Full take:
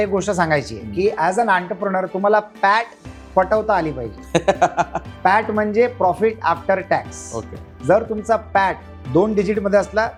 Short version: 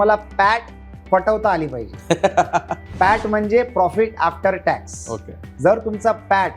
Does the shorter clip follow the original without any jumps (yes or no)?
yes